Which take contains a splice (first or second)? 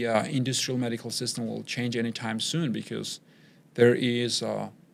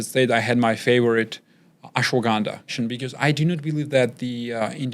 second